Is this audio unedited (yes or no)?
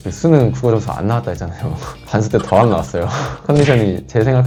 yes